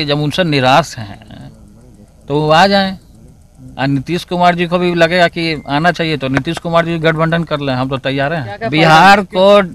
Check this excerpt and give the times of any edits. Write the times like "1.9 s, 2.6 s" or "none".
8.6 s